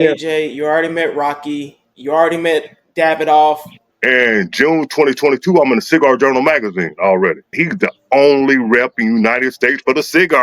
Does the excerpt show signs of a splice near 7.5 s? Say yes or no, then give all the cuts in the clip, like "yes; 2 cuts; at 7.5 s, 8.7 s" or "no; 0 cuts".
yes; 2 cuts; at 3.9 s, 7.5 s